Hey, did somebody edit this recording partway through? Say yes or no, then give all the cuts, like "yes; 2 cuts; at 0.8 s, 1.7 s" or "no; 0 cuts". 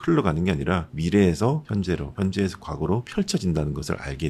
yes; 3 cuts; at 0.9 s, 1.9 s, 3.1 s